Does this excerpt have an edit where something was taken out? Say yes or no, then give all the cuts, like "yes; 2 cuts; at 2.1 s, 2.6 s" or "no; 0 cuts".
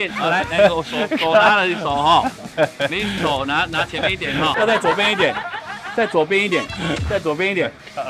yes; 1 cut; at 4.5 s